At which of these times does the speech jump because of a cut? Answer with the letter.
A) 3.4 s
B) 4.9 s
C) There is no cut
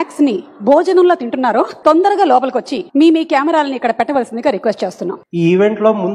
C